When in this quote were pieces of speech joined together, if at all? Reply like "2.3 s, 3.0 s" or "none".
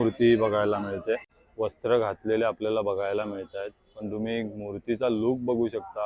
1.3 s

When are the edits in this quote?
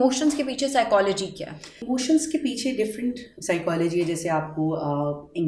1.8 s

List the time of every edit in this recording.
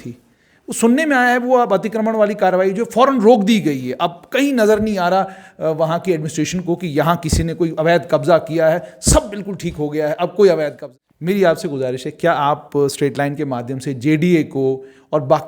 10.8 s

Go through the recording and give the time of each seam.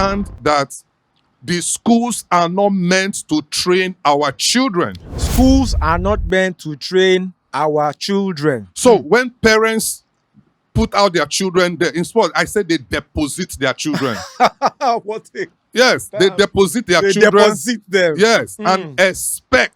none

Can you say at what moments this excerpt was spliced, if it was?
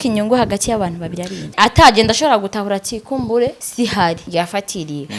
1.5 s, 3.6 s, 4.2 s

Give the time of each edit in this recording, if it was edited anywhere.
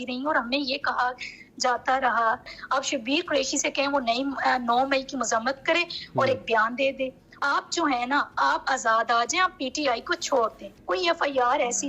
2.5 s, 7.4 s, 10.7 s

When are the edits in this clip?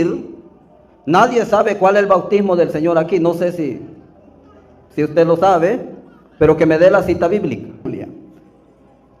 7.9 s

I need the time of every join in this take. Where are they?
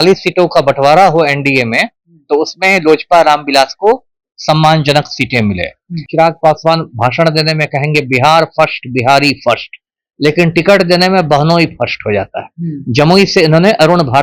6.1 s

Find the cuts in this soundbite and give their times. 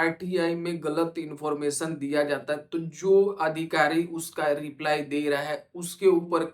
none

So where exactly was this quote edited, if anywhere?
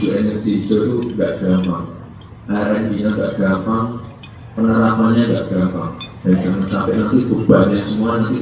none

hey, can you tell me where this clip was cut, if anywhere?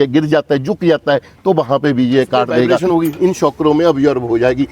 2.8 s

